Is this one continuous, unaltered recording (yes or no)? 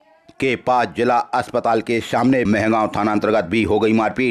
no